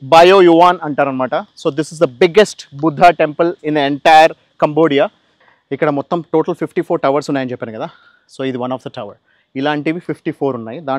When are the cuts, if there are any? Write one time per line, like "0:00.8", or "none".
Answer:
0:05.3